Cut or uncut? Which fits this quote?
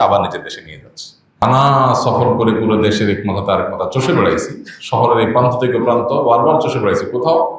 cut